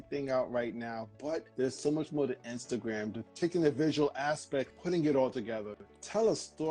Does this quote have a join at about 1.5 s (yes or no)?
yes